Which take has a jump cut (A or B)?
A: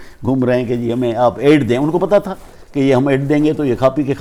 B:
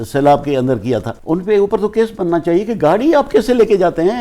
B